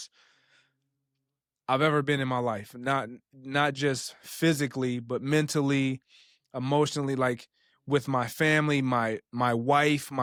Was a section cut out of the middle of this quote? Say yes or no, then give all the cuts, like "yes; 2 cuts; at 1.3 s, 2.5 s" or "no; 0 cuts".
no; 0 cuts